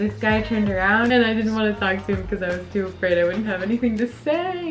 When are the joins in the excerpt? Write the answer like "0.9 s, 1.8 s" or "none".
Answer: 1.1 s